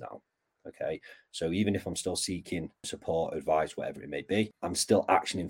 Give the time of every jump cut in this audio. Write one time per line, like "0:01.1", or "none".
0:02.9
0:04.6

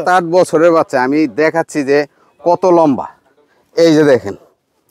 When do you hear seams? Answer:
none

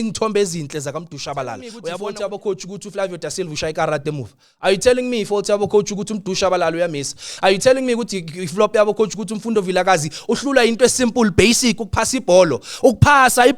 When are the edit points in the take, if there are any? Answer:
0:01.8

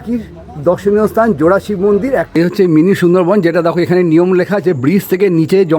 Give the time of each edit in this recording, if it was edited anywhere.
0:02.4

